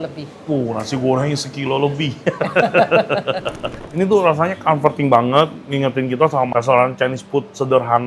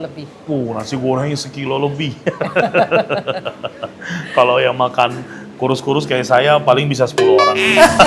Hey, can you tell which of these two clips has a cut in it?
first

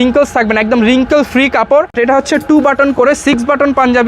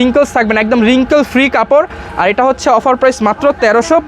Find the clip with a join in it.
first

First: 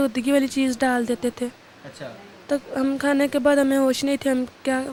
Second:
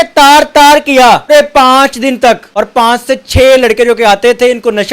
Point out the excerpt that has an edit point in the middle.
second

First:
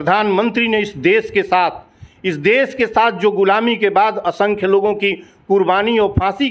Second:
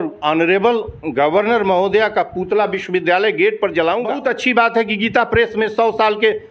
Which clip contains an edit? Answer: second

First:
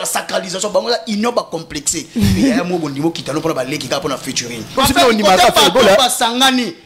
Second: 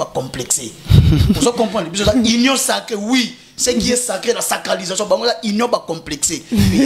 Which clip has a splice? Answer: first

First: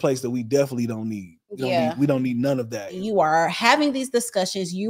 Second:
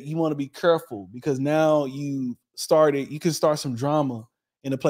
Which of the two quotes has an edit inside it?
first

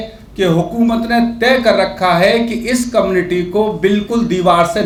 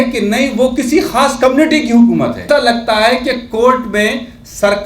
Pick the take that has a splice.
second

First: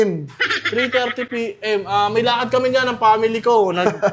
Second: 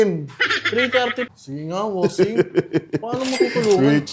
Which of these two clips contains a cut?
second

